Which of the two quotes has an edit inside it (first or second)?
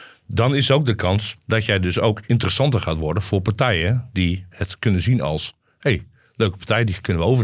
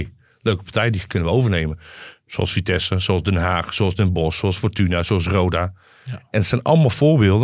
first